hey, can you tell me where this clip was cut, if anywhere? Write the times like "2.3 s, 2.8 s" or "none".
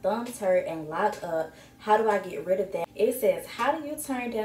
2.8 s